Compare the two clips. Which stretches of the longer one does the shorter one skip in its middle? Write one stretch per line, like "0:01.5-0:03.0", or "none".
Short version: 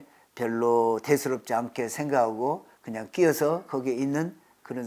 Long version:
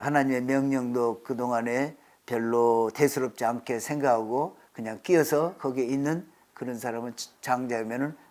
none